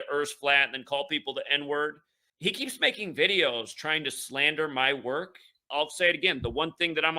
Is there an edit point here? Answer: yes; 2 cuts; at 2.2 s, 5.6 s

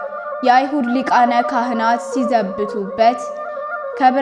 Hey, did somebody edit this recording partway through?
no; 0 cuts

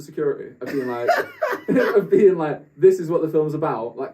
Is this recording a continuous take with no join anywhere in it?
yes; 0 cuts

